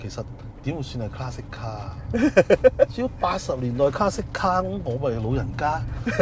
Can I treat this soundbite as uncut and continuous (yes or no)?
yes